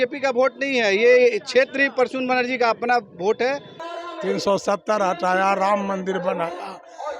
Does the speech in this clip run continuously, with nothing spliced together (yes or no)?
no